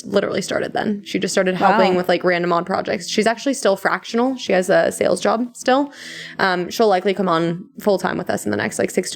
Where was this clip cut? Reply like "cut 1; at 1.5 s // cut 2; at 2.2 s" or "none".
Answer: none